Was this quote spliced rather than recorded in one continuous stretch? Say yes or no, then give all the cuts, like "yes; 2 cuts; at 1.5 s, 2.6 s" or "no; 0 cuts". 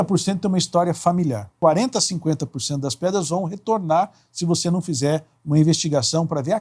yes; 1 cut; at 1.5 s